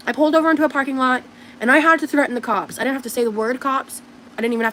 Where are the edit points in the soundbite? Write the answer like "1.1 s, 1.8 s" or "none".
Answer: none